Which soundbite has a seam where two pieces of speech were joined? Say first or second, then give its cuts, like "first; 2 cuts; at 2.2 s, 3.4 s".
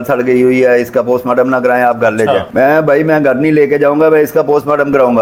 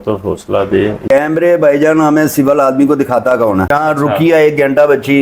second; 2 cuts; at 1.1 s, 3.7 s